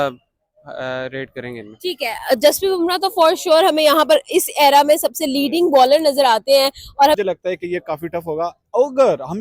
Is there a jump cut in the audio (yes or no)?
yes